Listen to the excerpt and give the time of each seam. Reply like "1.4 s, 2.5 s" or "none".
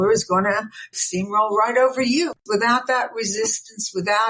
2.4 s